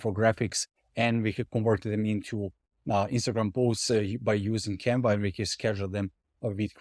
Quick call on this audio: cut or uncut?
uncut